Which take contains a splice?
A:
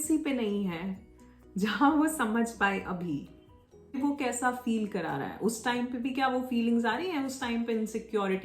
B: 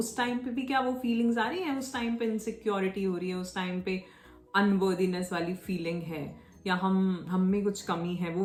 A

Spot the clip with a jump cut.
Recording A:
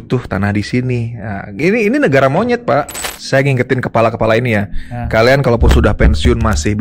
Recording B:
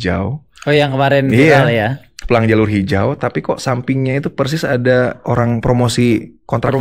A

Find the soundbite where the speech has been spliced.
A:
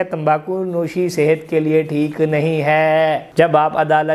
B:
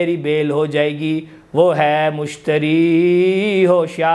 A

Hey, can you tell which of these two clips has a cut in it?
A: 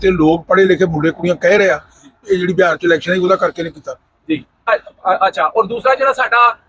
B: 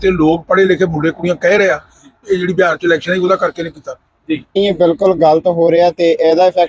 B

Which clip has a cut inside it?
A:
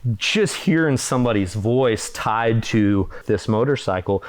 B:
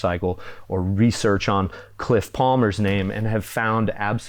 A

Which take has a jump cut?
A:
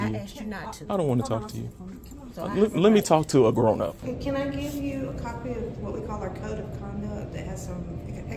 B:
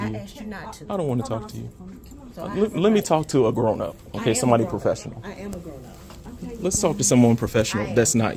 A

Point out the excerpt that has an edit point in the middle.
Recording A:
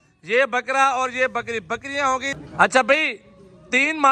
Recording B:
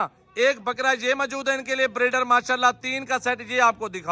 A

